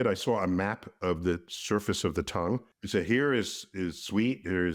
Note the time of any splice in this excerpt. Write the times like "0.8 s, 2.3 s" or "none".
2.6 s